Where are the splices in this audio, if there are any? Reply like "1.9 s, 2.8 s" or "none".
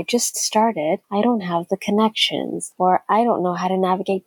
1.0 s, 2.6 s